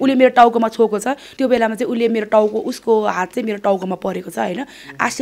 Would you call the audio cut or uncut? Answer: cut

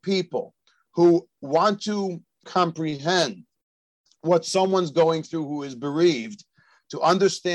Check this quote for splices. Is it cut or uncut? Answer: cut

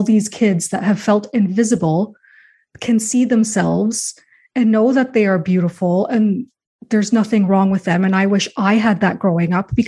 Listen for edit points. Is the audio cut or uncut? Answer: uncut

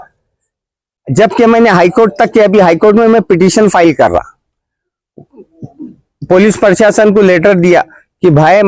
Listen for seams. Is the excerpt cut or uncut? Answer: uncut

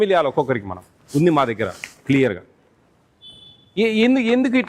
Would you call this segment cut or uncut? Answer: uncut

